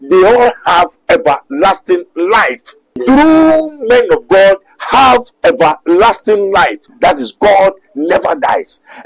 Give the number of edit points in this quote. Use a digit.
2